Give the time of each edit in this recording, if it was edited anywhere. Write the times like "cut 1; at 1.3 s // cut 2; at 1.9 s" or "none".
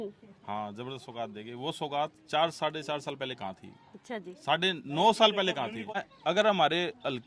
cut 1; at 6.0 s

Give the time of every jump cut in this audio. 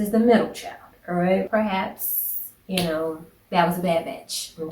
cut 1; at 1.5 s

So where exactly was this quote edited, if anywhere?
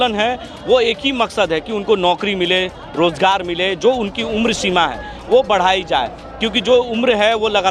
none

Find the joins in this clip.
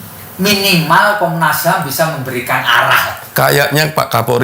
cut 1; at 3.2 s

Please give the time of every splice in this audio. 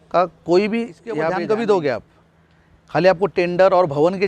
cut 1; at 1.2 s

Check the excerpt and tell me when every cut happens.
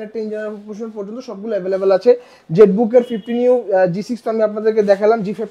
none

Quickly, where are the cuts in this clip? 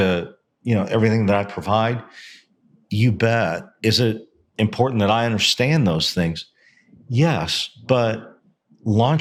none

